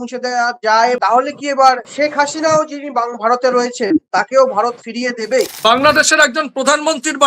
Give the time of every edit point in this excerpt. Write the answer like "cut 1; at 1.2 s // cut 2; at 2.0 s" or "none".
cut 1; at 1.0 s // cut 2; at 1.9 s // cut 3; at 4.1 s // cut 4; at 5.5 s